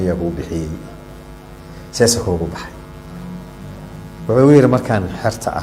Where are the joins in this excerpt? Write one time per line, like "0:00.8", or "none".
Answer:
none